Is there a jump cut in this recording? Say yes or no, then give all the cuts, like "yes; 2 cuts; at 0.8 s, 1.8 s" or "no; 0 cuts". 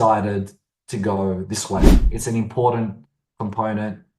yes; 1 cut; at 2.0 s